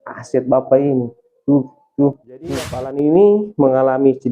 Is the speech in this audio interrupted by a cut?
yes; 1 cut; at 2.9 s

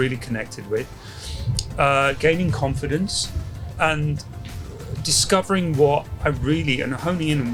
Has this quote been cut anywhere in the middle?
no; 0 cuts

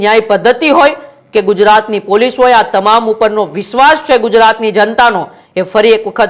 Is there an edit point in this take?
no; 0 cuts

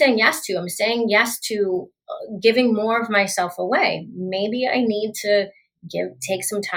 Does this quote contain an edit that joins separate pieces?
no; 0 cuts

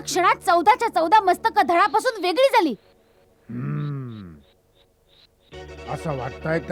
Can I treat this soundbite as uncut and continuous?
yes; 0 cuts

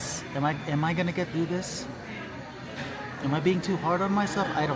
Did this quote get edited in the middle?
no; 0 cuts

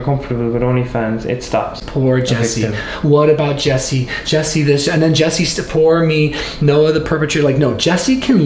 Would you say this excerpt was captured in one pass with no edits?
no; 1 cut; at 1.8 s

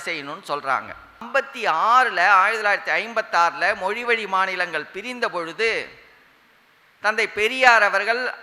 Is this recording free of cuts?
no; 1 cut; at 1.3 s

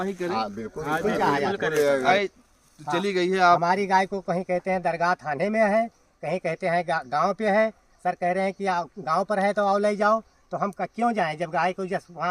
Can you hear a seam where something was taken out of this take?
yes; 1 cut; at 2.1 s

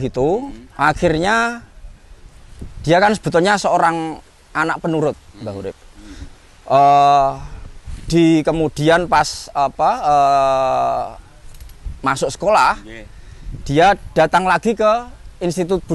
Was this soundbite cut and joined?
no; 0 cuts

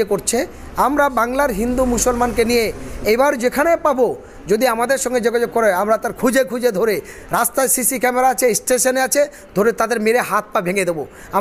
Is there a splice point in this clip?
no; 0 cuts

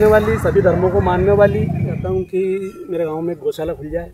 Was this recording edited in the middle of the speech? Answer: yes; 1 cut; at 2.0 s

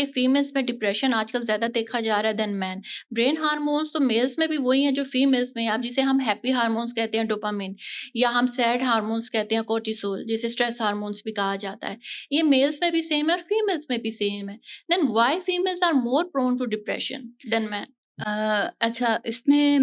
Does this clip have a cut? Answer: no; 0 cuts

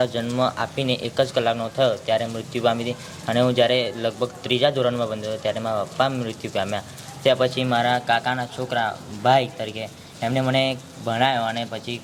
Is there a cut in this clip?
no; 0 cuts

